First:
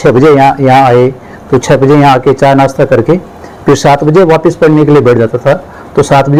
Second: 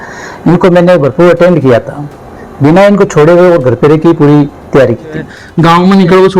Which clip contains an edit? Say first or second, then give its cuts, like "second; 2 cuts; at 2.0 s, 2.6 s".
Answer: second; 1 cut; at 5.4 s